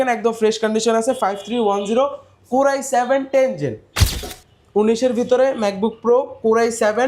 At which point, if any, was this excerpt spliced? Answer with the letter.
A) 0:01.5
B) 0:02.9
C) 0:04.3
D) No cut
C